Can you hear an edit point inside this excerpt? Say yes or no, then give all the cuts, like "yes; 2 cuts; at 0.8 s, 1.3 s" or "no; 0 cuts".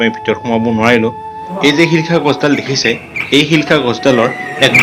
yes; 1 cut; at 1.5 s